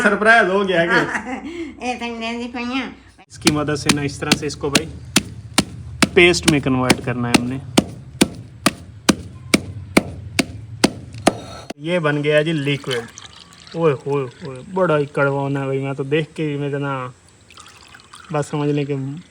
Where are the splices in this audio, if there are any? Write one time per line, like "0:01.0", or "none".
0:03.3
0:11.5